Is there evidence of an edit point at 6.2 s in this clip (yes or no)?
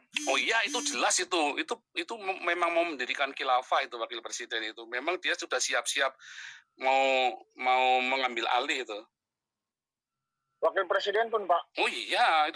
no